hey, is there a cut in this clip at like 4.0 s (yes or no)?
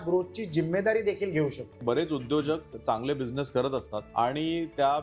yes